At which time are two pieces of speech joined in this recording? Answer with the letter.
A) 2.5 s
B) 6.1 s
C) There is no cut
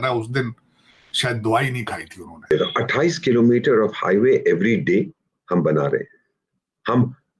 A